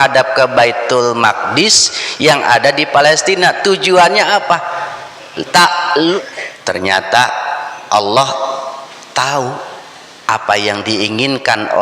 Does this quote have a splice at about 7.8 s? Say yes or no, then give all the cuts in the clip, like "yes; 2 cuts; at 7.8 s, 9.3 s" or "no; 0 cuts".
no; 1 cut; at 6.2 s